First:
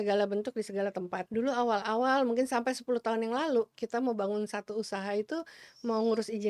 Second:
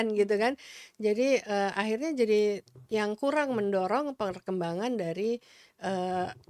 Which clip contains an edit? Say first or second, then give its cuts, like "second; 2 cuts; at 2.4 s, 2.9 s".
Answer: first; 1 cut; at 1.2 s